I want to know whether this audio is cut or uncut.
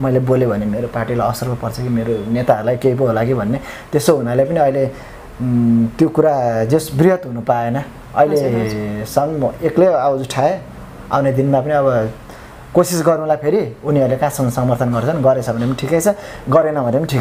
uncut